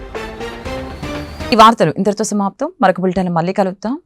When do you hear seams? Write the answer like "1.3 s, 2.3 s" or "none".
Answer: none